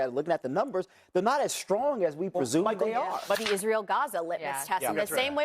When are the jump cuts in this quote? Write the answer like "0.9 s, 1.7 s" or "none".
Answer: 3.4 s